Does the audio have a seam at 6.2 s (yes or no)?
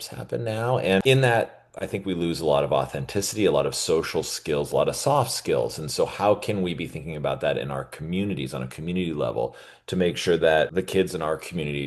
no